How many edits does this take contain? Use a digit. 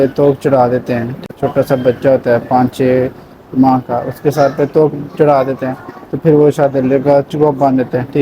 1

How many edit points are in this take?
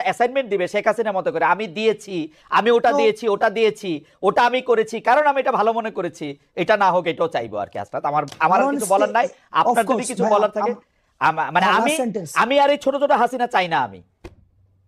0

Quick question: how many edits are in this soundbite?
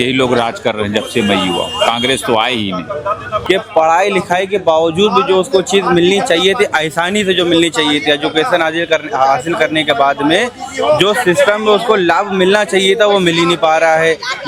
1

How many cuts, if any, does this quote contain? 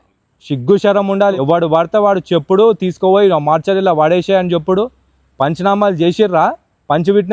0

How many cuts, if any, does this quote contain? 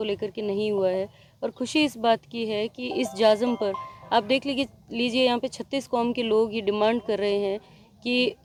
0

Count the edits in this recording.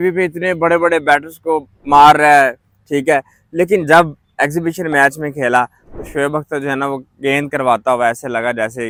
0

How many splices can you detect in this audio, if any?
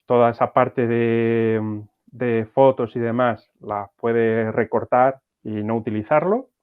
1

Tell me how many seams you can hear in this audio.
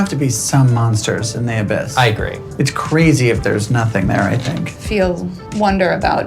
1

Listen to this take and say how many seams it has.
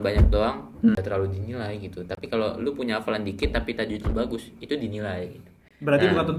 1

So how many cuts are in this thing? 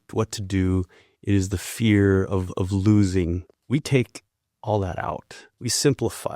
2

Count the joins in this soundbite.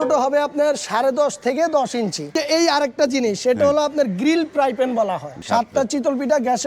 2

